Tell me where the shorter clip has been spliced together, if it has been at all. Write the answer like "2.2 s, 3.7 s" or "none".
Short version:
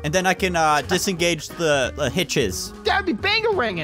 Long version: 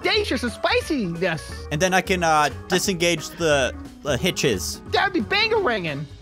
0.8 s, 1.9 s